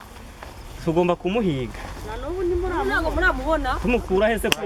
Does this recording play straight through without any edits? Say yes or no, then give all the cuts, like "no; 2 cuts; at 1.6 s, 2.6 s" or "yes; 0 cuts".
yes; 0 cuts